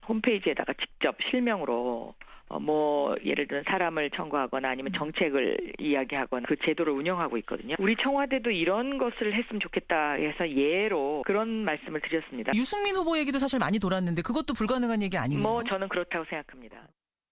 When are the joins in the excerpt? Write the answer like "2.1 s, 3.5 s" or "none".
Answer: 12.7 s

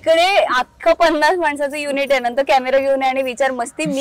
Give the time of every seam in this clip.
none

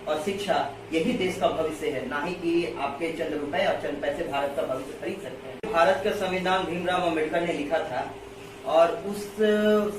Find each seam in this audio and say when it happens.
5.7 s

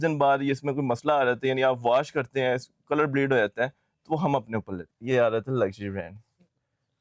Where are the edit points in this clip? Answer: 4.8 s

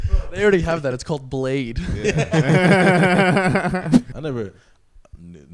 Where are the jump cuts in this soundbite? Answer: 4.1 s

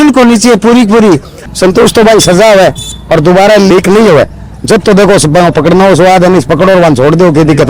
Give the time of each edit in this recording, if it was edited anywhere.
1.5 s

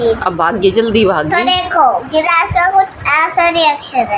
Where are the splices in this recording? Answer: none

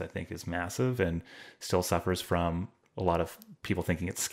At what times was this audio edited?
2.8 s

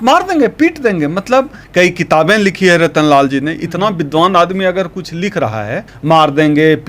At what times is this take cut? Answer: 1.6 s, 5.9 s

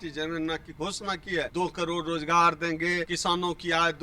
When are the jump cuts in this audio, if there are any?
1.5 s, 3.1 s

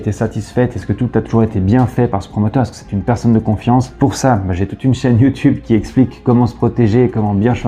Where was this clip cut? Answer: none

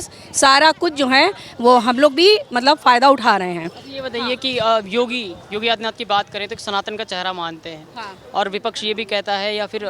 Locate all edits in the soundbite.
none

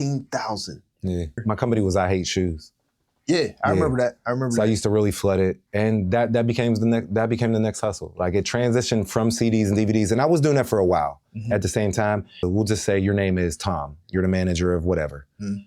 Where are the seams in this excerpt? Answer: 1.4 s, 12.4 s

